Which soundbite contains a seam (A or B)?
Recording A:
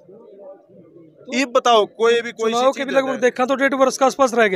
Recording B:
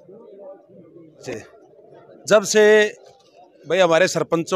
B